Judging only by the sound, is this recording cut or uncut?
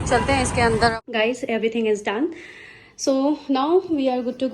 cut